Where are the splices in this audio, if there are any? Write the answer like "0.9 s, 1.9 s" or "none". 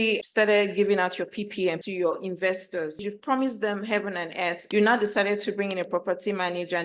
3.0 s, 4.7 s